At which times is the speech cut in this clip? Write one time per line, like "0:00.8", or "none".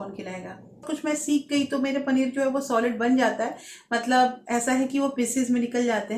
0:00.9